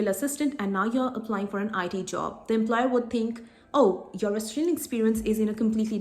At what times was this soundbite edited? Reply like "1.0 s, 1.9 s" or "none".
none